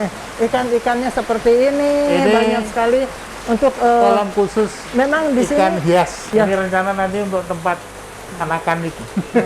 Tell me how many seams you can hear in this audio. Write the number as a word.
one